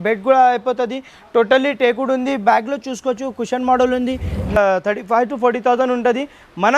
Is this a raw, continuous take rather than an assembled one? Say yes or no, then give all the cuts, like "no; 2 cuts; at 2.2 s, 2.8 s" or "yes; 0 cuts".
no; 1 cut; at 4.6 s